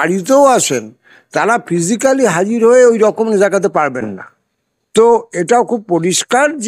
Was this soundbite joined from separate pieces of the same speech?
no; 0 cuts

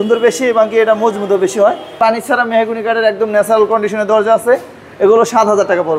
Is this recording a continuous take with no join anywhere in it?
no; 1 cut; at 2.0 s

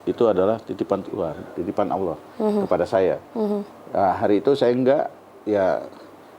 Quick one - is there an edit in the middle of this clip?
no; 0 cuts

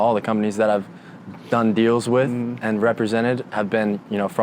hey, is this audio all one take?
yes; 0 cuts

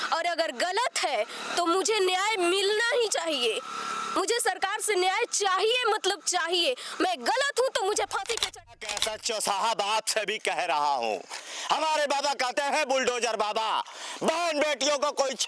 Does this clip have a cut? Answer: yes; 1 cut; at 8.8 s

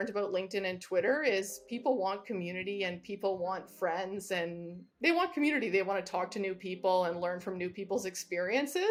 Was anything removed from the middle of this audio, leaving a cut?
no; 0 cuts

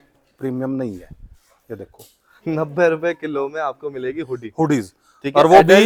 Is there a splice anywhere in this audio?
no; 0 cuts

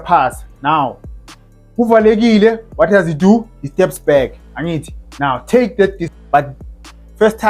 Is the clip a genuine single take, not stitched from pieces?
no; 1 cut; at 6.1 s

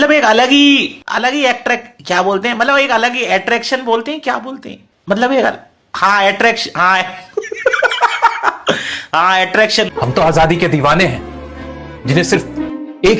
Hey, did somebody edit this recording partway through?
yes; 1 cut; at 9.9 s

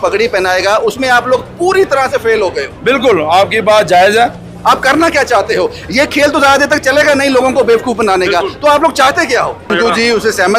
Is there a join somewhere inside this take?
yes; 2 cuts; at 4.5 s, 9.6 s

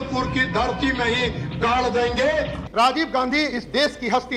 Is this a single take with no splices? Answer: no; 1 cut; at 2.6 s

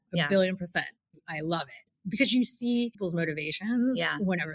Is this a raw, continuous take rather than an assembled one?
yes; 0 cuts

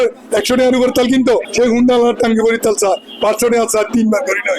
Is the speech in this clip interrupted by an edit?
yes; 1 cut; at 1.5 s

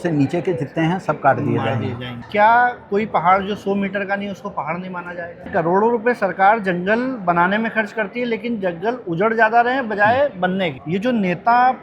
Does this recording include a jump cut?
yes; 3 cuts; at 2.2 s, 5.5 s, 10.8 s

